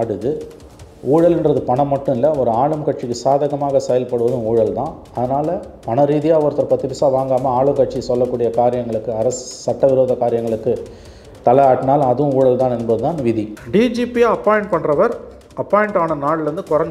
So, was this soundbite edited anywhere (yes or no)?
yes